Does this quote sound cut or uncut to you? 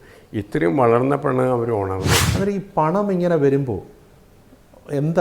cut